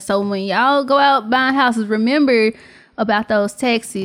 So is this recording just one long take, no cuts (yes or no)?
yes